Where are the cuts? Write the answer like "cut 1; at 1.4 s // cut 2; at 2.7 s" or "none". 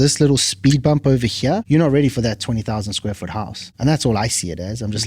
cut 1; at 1.6 s // cut 2; at 3.6 s